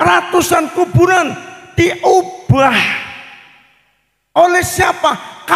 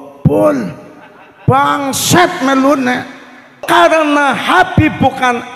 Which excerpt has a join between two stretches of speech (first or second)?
second